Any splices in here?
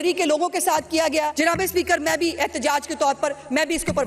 yes; 1 cut; at 1.3 s

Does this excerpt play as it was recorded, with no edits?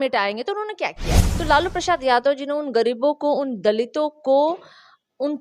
no; 1 cut; at 1.1 s

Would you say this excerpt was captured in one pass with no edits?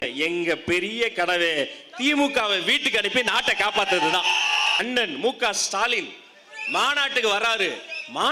no; 1 cut; at 4.8 s

